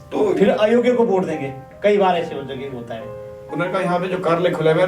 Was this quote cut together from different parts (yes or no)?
yes